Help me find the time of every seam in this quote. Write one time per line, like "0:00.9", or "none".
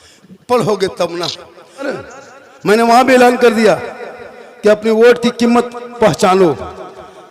0:01.9